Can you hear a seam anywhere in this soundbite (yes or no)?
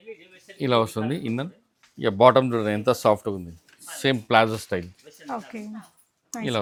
no